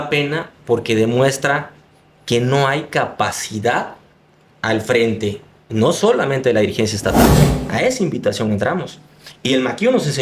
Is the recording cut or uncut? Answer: cut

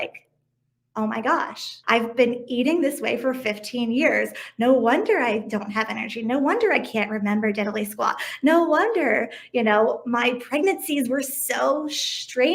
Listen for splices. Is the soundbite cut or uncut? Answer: cut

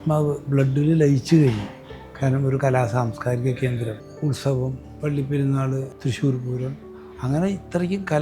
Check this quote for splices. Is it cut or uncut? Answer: cut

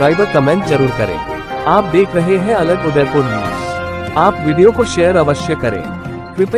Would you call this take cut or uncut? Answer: uncut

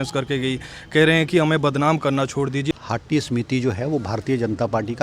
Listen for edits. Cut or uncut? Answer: cut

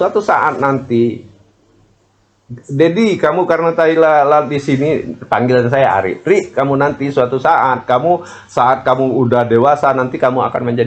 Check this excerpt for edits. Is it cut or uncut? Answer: uncut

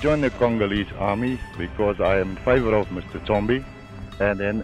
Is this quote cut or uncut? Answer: uncut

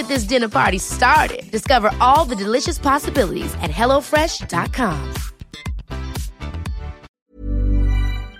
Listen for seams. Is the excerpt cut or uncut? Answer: cut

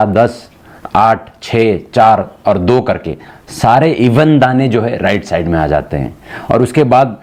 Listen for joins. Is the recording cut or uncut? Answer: uncut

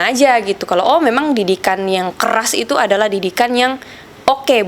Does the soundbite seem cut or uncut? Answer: uncut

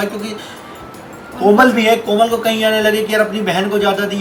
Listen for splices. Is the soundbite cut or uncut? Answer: uncut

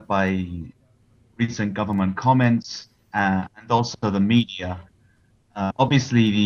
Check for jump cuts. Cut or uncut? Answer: cut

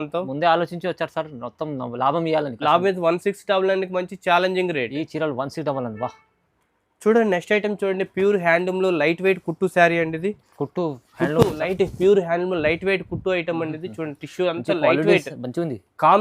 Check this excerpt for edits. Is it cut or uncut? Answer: uncut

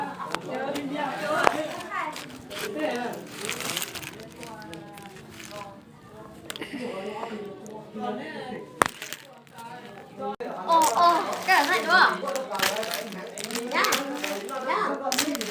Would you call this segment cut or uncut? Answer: cut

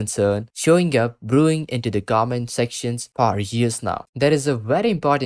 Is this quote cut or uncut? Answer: cut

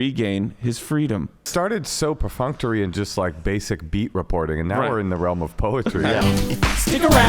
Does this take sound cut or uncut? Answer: cut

